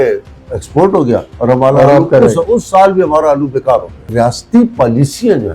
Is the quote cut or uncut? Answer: cut